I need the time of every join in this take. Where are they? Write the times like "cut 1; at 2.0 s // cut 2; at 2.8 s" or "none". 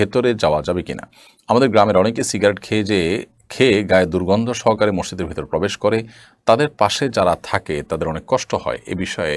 none